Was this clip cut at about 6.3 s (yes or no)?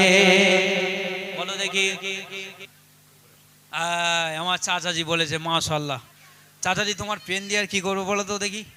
no